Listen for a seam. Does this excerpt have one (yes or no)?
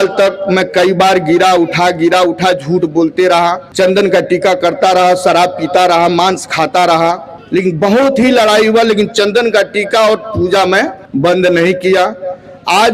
yes